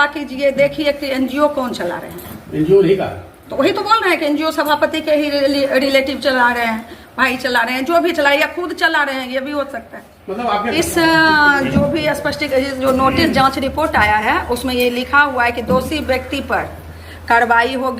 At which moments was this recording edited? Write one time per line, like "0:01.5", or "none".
0:10.7